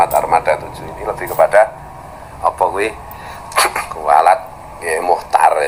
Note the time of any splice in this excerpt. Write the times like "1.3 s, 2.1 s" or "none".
none